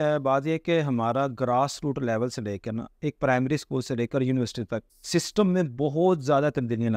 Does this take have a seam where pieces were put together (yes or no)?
no